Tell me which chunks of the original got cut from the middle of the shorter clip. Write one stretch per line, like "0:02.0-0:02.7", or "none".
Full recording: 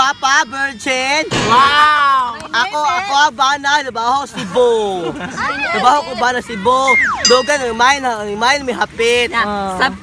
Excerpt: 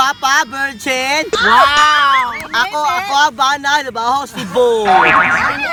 none